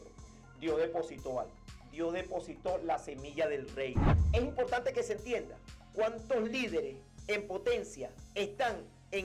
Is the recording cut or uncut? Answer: cut